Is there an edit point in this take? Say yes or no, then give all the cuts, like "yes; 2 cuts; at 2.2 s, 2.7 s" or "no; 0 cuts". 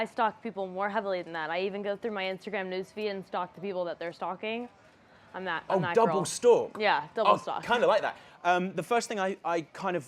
yes; 1 cut; at 5.6 s